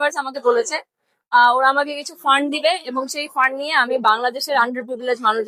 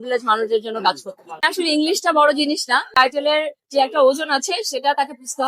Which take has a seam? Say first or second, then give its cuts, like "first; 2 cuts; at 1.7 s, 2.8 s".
second; 2 cuts; at 1.5 s, 2.9 s